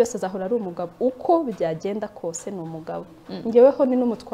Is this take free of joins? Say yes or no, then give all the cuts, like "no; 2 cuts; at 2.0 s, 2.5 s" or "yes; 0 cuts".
yes; 0 cuts